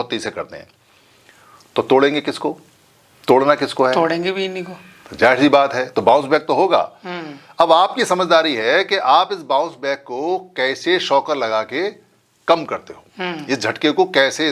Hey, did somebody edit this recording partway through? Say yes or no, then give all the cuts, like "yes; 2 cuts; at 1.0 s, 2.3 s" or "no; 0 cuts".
no; 0 cuts